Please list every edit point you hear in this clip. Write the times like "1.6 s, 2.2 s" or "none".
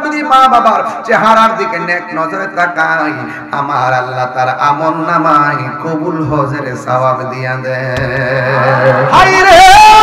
9.0 s